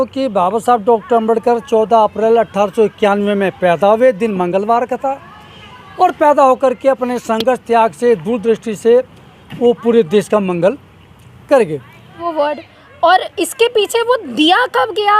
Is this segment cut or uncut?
cut